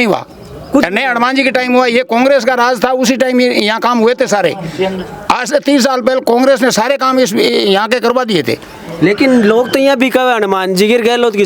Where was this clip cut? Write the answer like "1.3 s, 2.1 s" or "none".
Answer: none